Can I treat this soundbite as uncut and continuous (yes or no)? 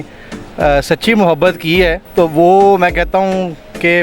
no